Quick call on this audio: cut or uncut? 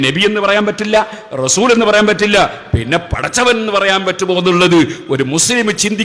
uncut